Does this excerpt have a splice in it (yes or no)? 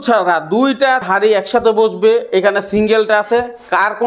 yes